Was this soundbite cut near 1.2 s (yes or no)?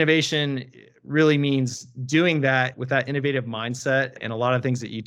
no